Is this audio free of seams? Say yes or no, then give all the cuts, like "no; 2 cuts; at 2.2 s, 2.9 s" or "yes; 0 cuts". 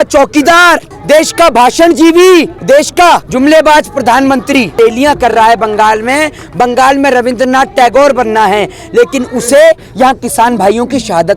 no; 3 cuts; at 0.9 s, 3.0 s, 4.7 s